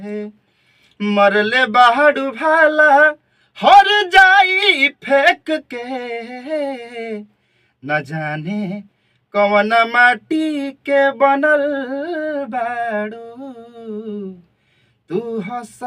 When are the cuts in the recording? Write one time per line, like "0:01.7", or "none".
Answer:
none